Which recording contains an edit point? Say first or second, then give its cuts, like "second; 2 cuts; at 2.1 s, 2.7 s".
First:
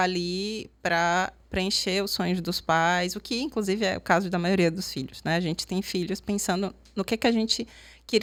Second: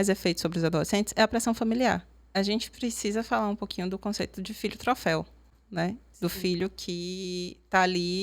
second; 1 cut; at 2.2 s